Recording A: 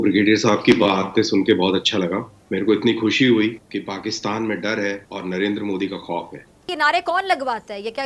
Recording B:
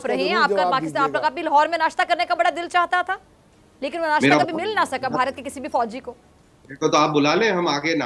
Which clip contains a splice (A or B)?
A